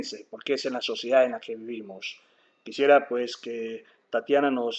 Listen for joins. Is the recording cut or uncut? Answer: cut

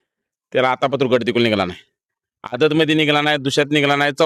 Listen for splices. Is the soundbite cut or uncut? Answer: uncut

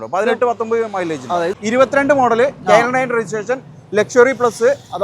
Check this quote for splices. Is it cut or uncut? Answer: cut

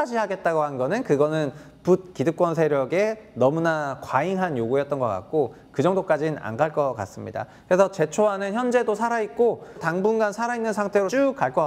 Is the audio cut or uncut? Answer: cut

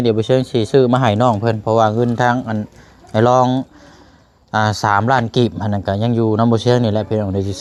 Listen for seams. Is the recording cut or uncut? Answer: uncut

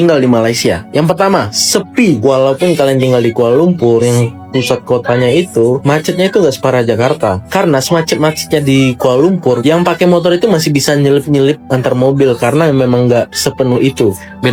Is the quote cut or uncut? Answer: uncut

